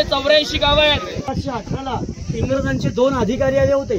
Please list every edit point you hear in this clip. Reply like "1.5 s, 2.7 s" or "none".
1.2 s